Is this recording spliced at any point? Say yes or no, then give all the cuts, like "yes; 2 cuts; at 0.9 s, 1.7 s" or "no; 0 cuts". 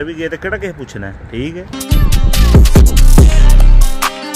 yes; 1 cut; at 1.7 s